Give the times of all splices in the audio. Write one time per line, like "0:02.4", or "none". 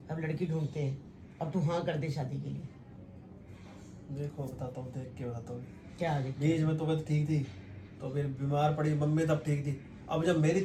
none